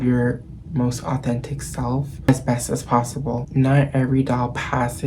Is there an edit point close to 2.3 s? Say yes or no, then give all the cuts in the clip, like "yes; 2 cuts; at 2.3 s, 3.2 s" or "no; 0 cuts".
yes; 2 cuts; at 2.3 s, 3.5 s